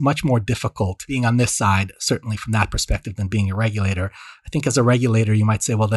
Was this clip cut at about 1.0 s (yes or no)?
yes